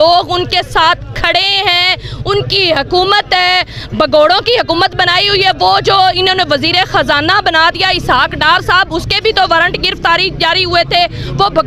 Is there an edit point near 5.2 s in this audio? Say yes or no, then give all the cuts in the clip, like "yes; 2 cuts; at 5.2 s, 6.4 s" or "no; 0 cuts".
no; 0 cuts